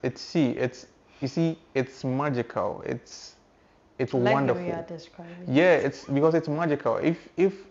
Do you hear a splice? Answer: no; 0 cuts

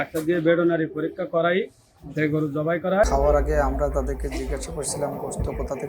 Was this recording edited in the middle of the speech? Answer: yes; 1 cut; at 3.1 s

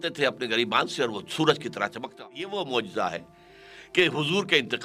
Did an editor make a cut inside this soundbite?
yes; 1 cut; at 2.0 s

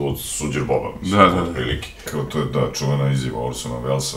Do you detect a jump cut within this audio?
yes; 1 cut; at 2.1 s

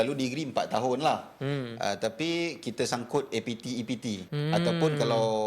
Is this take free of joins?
no; 1 cut; at 4.3 s

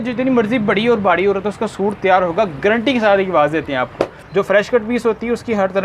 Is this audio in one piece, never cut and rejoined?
no; 1 cut; at 4.2 s

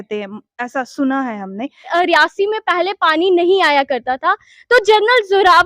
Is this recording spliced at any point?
yes; 1 cut; at 1.9 s

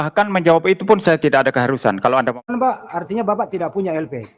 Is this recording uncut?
no; 1 cut; at 2.5 s

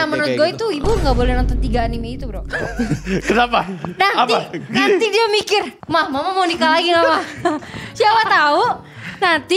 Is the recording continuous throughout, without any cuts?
no; 1 cut; at 5.8 s

